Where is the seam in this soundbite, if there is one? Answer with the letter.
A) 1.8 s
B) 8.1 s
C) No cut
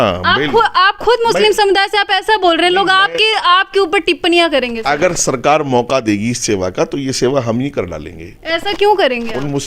C